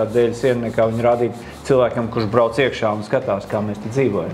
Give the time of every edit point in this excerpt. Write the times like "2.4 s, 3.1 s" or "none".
none